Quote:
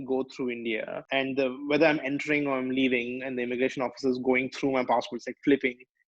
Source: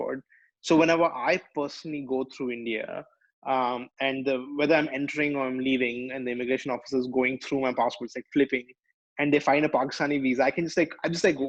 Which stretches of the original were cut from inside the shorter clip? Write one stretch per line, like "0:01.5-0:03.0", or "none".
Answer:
0:03.0-0:03.9